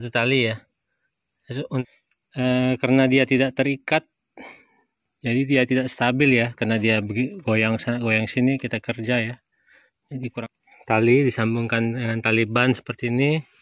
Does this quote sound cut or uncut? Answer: cut